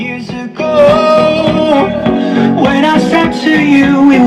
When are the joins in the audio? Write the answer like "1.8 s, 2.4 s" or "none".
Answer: none